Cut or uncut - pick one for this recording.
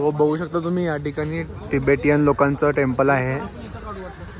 uncut